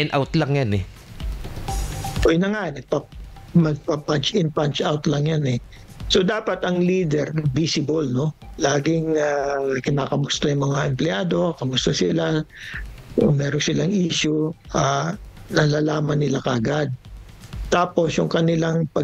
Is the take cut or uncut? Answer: uncut